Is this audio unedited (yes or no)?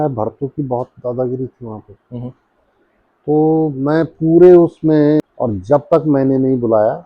no